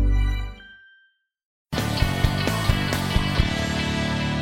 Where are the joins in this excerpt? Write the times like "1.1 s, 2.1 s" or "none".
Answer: 1.6 s